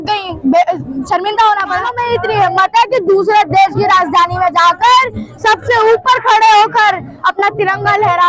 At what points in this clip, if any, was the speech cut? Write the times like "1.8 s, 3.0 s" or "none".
1.9 s